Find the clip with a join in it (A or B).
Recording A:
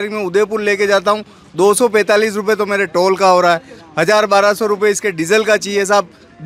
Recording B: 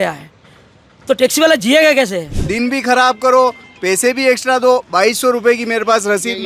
B